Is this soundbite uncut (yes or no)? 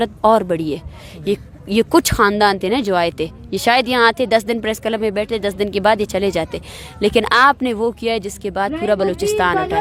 yes